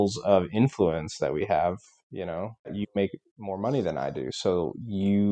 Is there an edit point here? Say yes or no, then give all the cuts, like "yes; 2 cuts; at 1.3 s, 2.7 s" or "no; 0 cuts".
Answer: yes; 1 cut; at 2.7 s